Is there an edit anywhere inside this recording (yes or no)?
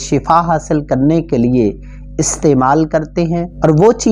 no